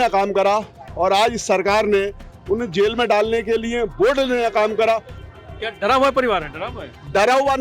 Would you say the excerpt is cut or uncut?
cut